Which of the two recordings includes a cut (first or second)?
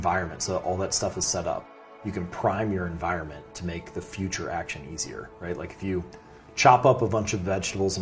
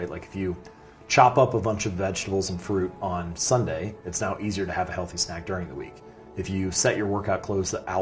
first